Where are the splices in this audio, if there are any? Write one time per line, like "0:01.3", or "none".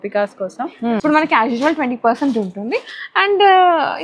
0:01.0